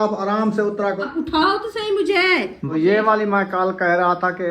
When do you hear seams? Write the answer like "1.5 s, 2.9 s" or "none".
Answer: 1.0 s, 2.6 s